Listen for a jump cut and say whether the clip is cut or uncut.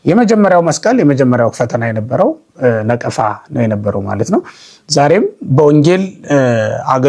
uncut